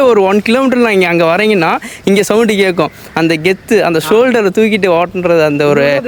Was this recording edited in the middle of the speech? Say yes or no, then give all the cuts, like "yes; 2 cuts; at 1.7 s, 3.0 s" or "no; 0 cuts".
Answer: no; 0 cuts